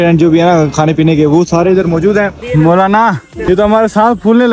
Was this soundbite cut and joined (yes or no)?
yes